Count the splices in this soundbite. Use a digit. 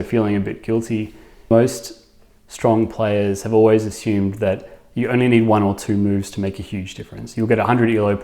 1